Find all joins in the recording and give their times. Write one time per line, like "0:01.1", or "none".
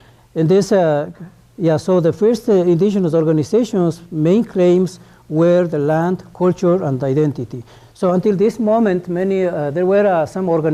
0:04.6